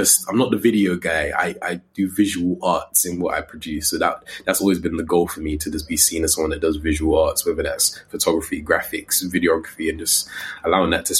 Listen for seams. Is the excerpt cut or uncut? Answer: uncut